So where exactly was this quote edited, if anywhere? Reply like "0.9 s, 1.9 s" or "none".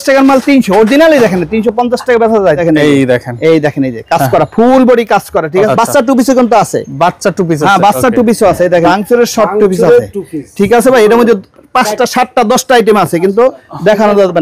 2.6 s, 5.7 s, 8.9 s